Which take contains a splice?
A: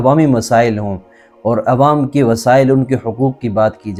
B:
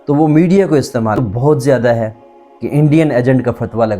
B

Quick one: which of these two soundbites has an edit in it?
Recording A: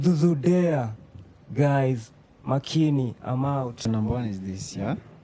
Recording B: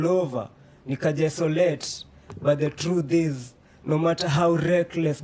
A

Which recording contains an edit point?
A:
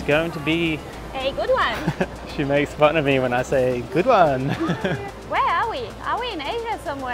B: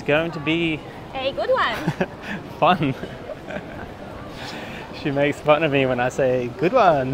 A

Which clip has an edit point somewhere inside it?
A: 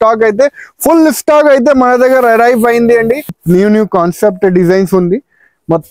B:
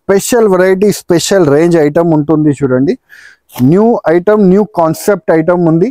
A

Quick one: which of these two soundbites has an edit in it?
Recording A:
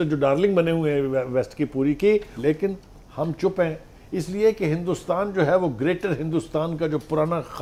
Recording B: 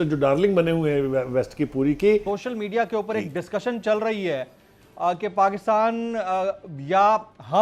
B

